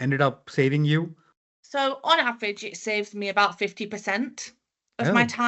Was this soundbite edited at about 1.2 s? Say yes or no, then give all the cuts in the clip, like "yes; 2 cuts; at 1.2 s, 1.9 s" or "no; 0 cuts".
yes; 1 cut; at 1.2 s